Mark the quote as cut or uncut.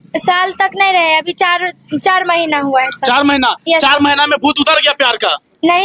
uncut